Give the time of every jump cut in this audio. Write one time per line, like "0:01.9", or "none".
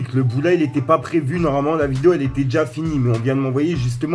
none